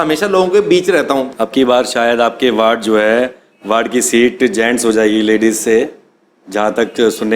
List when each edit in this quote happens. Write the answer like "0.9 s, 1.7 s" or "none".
1.3 s